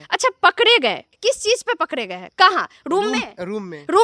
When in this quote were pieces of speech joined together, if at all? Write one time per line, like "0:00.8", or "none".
0:01.1